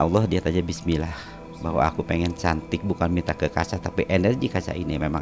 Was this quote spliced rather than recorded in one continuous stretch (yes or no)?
no